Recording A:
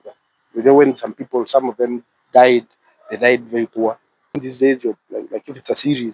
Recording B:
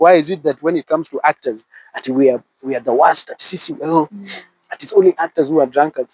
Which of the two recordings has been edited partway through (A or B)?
A